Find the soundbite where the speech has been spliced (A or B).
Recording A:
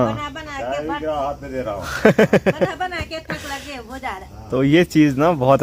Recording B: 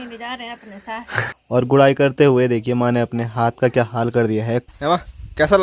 B